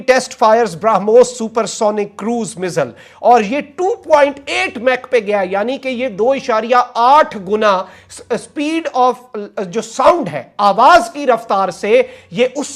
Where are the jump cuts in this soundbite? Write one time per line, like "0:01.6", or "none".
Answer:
none